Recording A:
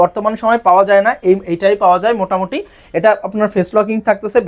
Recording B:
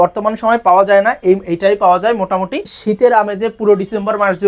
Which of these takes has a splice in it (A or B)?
B